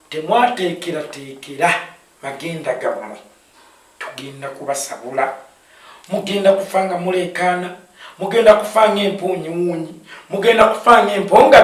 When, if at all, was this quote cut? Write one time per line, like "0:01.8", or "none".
none